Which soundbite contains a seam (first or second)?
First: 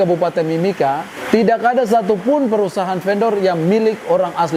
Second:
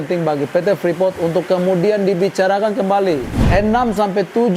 second